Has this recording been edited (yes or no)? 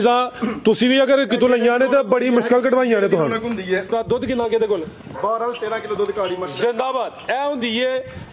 yes